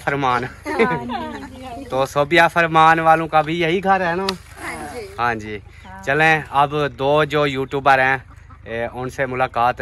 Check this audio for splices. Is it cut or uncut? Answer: uncut